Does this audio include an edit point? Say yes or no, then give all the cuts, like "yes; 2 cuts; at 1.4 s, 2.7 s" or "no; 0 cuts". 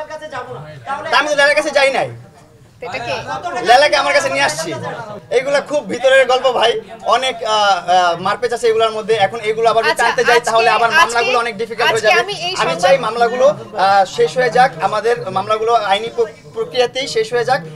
no; 0 cuts